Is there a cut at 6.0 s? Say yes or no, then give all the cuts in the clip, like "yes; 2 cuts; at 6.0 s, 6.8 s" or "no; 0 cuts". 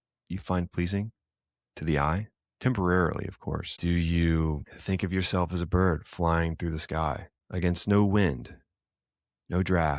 no; 3 cuts; at 3.7 s, 4.7 s, 7.3 s